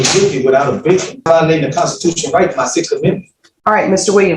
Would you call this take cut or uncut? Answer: cut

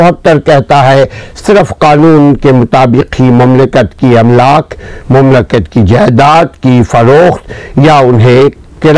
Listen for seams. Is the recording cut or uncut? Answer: uncut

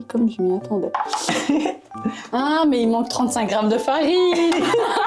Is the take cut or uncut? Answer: uncut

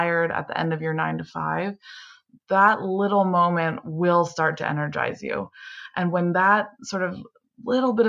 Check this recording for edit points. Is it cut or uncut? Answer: uncut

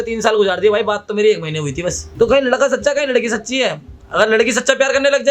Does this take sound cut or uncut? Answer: cut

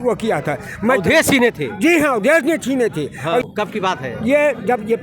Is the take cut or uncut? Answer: cut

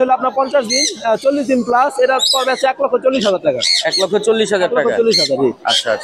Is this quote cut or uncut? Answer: uncut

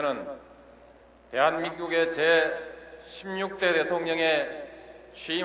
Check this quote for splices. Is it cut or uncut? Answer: uncut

